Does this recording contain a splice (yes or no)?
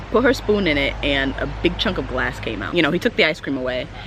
yes